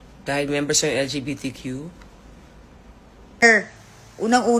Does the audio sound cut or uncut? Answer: cut